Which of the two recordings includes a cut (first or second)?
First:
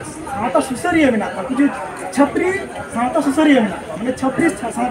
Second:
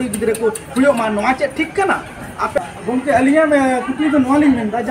second